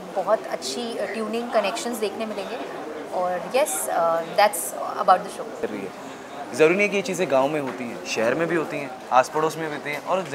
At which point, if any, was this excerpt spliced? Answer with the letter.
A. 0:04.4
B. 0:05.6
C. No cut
B